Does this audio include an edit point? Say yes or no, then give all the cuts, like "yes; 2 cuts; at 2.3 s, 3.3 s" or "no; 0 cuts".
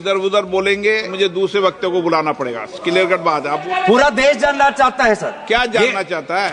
yes; 2 cuts; at 1.1 s, 3.6 s